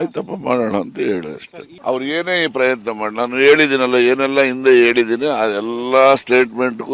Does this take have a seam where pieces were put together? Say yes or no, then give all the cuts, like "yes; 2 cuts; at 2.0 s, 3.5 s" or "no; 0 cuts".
no; 0 cuts